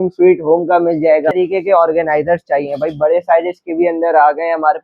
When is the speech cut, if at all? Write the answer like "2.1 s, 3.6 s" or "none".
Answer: 1.3 s